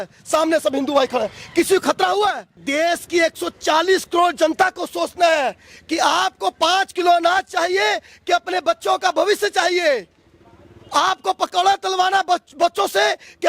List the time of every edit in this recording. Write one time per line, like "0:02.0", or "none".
0:02.6